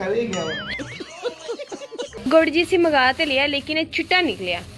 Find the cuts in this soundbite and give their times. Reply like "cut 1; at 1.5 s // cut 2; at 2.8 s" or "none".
cut 1; at 2.1 s